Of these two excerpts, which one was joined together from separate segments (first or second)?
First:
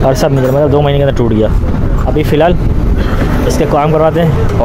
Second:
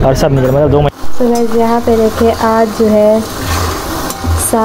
second